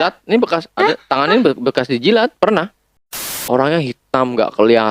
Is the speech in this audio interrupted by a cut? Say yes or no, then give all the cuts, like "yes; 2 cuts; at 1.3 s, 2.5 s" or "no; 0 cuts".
yes; 1 cut; at 3.3 s